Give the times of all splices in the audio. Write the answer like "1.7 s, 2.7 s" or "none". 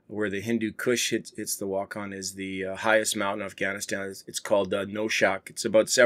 none